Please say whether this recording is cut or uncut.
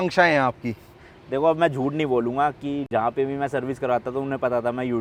uncut